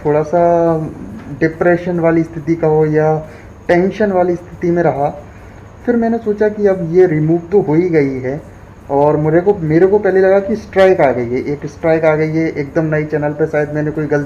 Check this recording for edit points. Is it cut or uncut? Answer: uncut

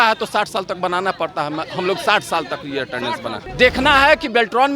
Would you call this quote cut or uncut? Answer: cut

